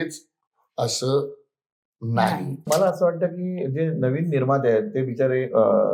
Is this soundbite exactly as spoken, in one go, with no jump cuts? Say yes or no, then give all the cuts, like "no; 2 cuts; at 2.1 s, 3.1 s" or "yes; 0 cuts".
no; 1 cut; at 2.6 s